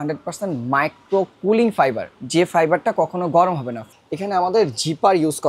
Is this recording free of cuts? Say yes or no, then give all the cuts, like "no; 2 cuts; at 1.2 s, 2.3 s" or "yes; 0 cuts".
no; 1 cut; at 3.7 s